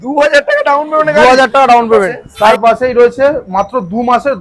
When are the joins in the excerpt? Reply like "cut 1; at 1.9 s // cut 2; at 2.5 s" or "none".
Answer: cut 1; at 2.2 s

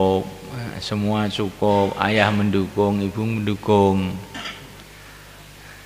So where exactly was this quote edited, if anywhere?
none

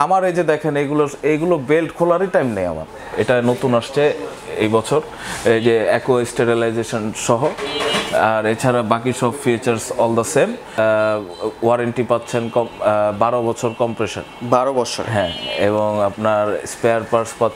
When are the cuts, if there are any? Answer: cut 1; at 3.0 s // cut 2; at 10.8 s

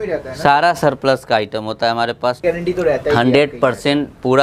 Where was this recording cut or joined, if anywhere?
cut 1; at 2.4 s

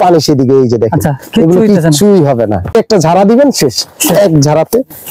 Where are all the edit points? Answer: cut 1; at 2.7 s

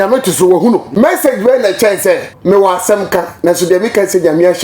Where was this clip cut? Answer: cut 1; at 0.9 s // cut 2; at 2.3 s

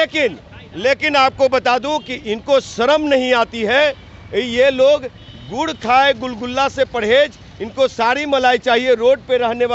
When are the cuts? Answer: none

